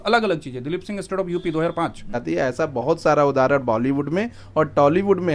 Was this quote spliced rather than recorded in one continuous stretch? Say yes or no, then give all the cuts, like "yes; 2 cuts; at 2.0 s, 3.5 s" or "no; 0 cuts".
yes; 1 cut; at 2.2 s